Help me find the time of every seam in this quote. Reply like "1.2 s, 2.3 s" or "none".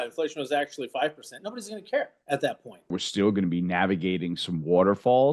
2.9 s